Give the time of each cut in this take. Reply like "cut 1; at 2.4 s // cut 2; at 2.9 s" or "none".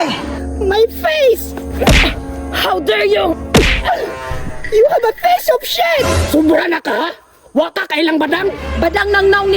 none